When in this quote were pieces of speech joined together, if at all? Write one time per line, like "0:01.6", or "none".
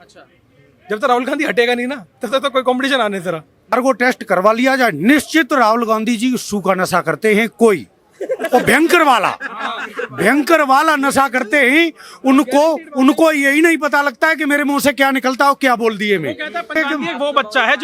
0:03.7
0:16.7